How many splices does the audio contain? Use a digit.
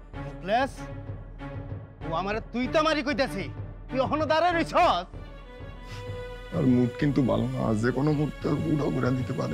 0